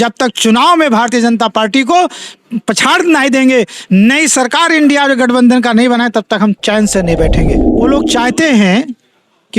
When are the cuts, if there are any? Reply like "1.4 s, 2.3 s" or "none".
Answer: 7.7 s

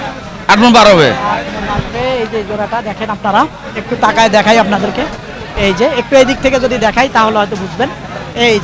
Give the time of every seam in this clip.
none

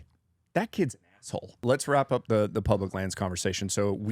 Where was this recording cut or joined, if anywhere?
1.5 s

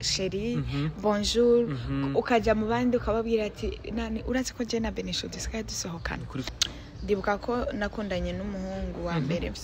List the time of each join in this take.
6.5 s

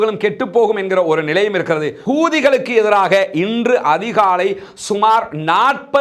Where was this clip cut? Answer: 1.9 s

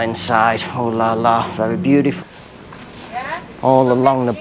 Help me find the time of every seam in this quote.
2.2 s

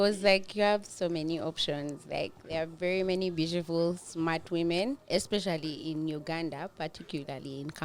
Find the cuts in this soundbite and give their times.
5.0 s

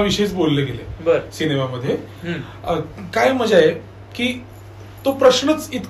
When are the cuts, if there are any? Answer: none

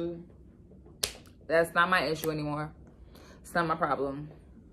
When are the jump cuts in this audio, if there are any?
none

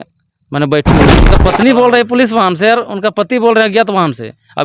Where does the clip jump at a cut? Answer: 1.3 s

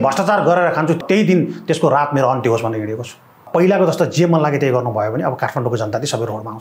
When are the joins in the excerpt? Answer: 1.0 s, 3.5 s

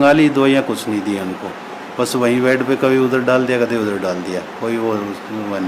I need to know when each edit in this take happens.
none

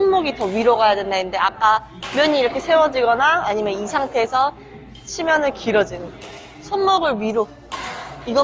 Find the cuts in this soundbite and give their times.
none

